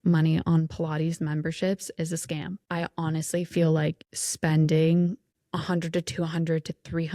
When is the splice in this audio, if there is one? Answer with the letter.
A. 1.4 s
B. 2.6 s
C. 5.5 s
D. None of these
D